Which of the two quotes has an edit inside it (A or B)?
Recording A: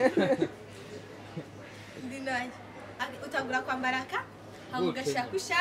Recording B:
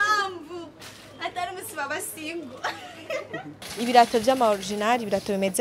B